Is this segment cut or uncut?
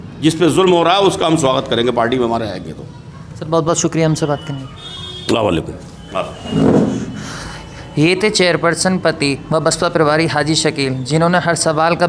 uncut